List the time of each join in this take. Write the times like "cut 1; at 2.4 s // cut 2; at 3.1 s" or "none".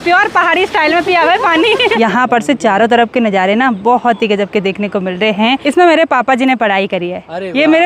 cut 1; at 1.9 s // cut 2; at 5.6 s